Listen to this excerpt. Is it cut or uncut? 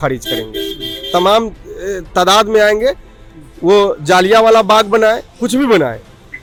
uncut